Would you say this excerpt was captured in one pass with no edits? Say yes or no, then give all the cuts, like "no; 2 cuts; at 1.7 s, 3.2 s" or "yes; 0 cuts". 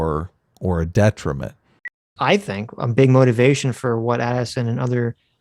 no; 1 cut; at 1.8 s